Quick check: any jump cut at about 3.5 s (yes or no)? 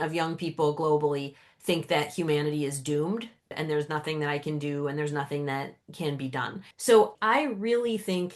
yes